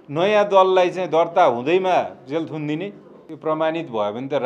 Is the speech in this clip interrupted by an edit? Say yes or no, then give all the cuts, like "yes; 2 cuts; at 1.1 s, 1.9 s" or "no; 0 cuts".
yes; 1 cut; at 3.3 s